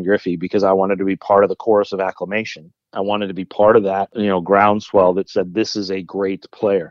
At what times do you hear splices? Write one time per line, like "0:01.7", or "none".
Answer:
0:04.1